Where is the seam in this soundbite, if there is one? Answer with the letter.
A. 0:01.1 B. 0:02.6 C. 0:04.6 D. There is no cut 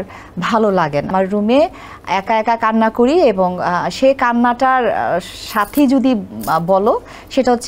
A